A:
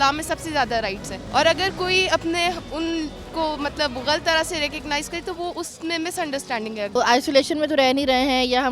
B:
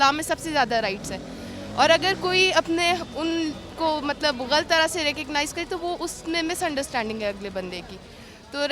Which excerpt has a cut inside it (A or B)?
A